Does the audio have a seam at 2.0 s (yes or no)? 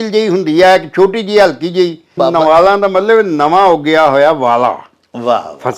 yes